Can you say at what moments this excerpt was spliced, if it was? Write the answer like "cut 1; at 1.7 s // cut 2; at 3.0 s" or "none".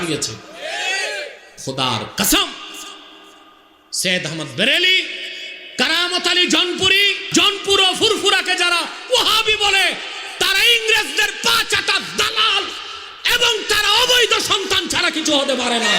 cut 1; at 1.5 s